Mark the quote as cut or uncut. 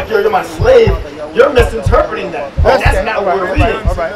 uncut